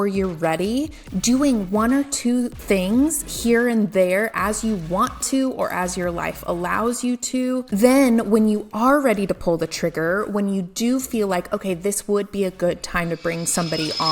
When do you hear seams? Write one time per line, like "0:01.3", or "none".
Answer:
0:02.6
0:07.8